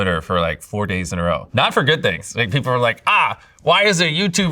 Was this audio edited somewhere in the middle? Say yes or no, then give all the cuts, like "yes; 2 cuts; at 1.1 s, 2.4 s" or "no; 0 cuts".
no; 0 cuts